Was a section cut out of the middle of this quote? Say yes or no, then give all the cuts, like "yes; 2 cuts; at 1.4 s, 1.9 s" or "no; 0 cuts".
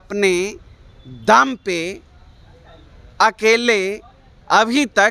no; 0 cuts